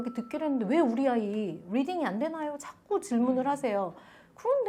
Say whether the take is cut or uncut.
uncut